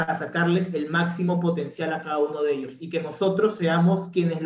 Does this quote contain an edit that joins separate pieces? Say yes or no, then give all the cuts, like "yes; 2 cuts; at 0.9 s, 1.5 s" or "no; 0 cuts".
no; 0 cuts